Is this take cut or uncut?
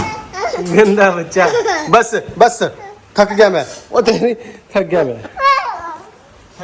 uncut